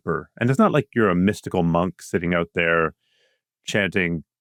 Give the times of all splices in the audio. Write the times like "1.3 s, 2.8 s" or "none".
none